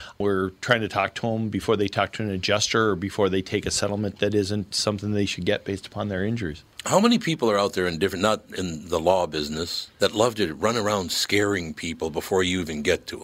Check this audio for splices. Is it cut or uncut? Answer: uncut